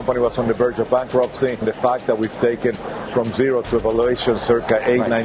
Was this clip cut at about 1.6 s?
yes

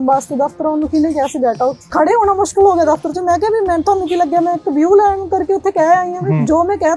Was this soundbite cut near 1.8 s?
yes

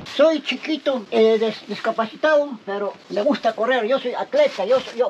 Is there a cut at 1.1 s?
yes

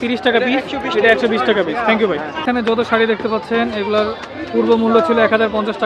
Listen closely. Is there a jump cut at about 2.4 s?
yes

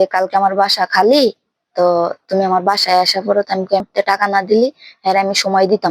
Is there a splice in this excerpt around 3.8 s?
yes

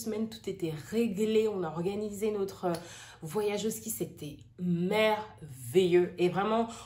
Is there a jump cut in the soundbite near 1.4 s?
no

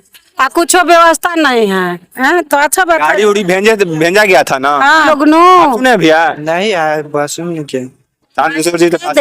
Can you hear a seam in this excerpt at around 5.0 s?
yes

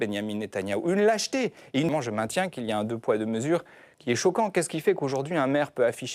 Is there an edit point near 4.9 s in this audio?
no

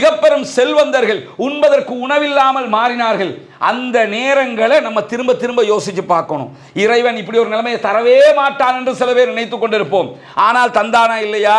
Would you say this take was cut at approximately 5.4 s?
no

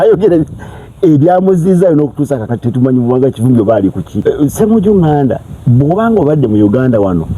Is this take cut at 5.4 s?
no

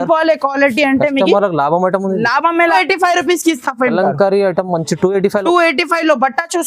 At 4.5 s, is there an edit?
no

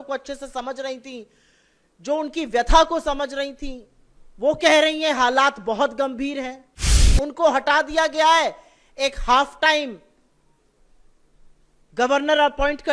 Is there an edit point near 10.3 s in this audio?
no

